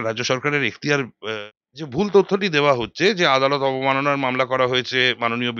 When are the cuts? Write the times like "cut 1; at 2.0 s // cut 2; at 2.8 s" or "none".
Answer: cut 1; at 1.2 s